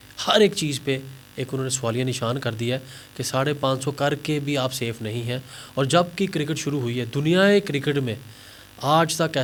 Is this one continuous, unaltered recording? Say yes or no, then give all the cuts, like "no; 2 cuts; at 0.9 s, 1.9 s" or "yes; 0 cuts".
yes; 0 cuts